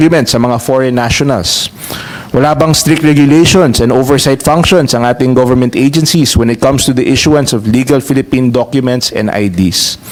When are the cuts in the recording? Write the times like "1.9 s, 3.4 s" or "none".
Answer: none